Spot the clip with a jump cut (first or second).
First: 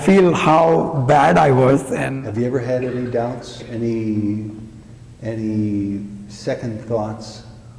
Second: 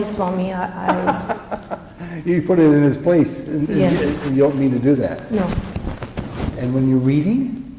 first